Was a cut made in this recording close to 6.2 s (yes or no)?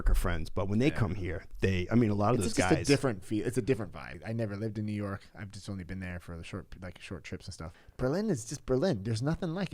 no